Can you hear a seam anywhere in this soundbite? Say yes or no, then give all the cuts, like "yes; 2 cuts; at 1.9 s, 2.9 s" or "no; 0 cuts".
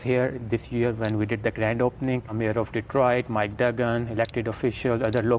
no; 0 cuts